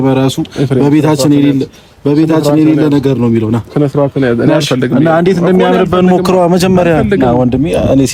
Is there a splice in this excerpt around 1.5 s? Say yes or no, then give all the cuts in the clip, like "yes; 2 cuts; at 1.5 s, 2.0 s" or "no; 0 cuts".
no; 0 cuts